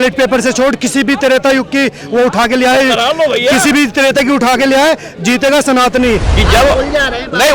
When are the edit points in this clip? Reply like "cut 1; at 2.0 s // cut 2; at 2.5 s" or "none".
cut 1; at 6.2 s